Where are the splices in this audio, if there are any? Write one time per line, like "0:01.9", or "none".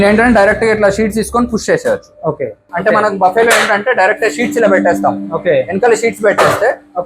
0:02.6